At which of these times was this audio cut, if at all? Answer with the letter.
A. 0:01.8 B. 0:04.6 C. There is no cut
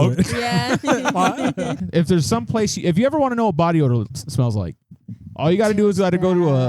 A